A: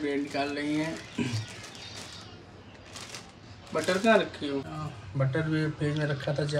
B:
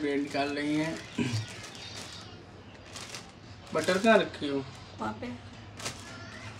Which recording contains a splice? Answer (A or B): A